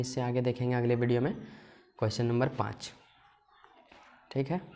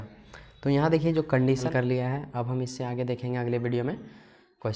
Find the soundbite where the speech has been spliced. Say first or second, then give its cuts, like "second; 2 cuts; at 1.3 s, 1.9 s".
second; 1 cut; at 1.7 s